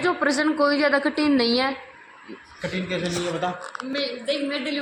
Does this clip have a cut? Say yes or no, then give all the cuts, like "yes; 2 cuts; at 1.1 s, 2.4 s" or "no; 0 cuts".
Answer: no; 0 cuts